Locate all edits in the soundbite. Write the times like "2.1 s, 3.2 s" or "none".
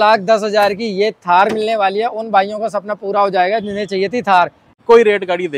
4.7 s